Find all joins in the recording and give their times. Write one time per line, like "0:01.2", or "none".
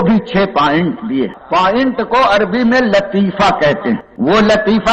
0:01.4
0:04.1

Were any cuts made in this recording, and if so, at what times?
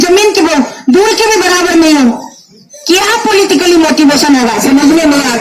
none

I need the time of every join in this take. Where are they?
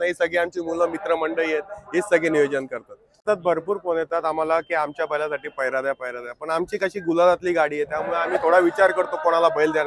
0:03.3

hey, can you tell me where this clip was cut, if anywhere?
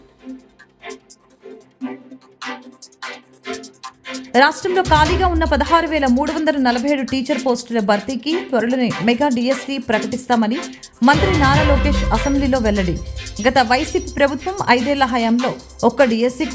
none

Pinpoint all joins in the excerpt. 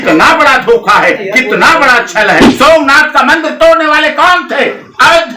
0:02.4

